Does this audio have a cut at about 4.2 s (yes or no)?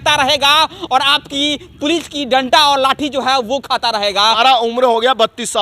yes